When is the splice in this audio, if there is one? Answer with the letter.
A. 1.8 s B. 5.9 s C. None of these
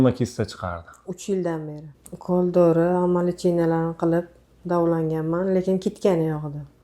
A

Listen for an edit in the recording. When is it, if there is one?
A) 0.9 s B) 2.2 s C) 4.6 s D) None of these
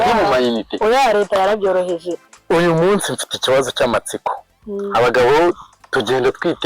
B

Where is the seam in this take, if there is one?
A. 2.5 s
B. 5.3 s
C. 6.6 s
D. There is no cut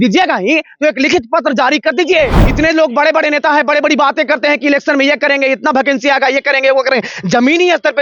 D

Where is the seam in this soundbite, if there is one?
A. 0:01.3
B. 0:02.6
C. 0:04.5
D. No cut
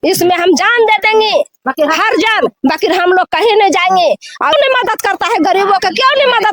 C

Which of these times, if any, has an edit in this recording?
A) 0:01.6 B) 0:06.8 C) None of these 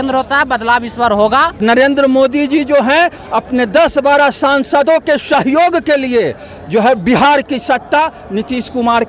A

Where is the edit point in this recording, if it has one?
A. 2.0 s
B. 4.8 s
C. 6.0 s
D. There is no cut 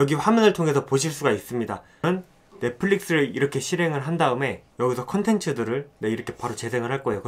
A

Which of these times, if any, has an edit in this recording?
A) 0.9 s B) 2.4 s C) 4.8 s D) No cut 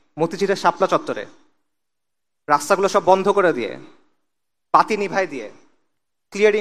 D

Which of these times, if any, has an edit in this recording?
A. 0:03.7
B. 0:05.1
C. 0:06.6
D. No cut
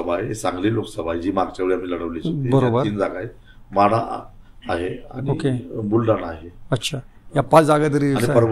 D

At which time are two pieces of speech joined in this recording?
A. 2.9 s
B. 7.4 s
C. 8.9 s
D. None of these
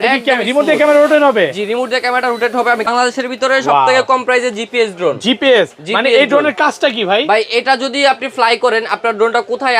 A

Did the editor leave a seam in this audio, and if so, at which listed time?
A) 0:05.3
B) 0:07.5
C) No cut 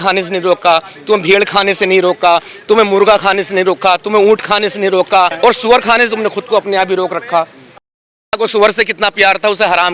A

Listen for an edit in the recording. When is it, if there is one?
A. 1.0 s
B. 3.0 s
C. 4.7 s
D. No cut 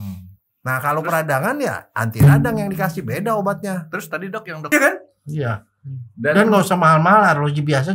C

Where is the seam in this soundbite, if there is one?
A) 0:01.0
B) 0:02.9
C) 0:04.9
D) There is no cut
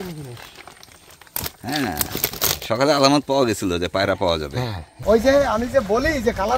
C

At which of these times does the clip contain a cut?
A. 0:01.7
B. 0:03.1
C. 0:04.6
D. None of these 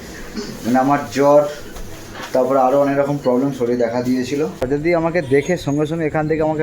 C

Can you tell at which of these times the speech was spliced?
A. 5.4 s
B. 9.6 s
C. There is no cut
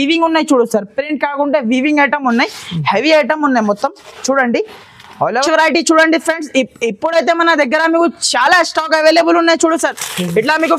A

